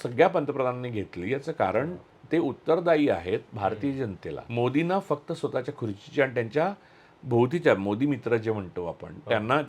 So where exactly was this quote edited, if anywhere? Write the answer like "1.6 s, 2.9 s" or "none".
4.4 s